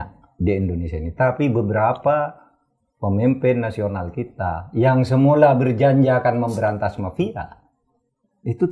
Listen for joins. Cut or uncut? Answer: uncut